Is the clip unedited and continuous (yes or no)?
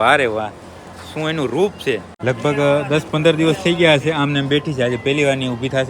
no